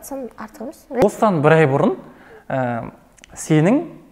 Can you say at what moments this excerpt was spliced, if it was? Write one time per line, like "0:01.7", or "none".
0:01.0